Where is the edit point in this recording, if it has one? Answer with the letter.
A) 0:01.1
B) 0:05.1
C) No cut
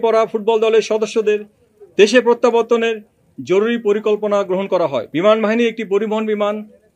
B